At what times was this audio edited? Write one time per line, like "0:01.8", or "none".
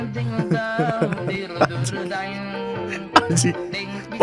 none